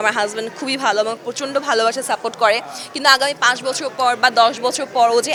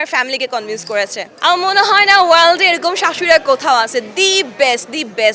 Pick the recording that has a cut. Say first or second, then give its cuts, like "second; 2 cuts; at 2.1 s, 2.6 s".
second; 1 cut; at 1.2 s